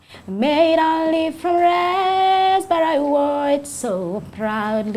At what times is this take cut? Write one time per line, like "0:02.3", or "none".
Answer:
none